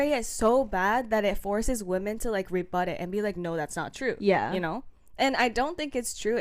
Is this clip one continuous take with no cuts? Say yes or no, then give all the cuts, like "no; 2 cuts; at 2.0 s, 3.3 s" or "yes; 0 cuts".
no; 1 cut; at 3.7 s